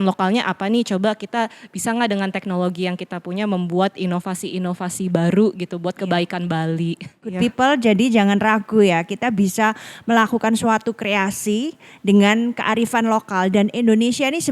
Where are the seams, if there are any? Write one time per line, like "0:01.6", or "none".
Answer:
0:07.4